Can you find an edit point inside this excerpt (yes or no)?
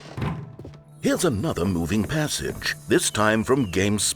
yes